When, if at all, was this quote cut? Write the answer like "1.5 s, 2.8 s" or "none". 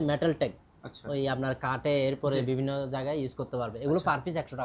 none